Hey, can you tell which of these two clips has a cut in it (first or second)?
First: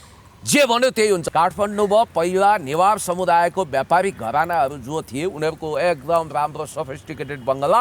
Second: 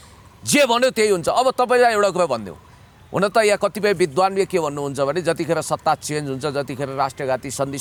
first